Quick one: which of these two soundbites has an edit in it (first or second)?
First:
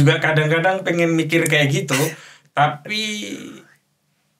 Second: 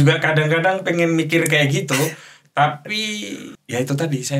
second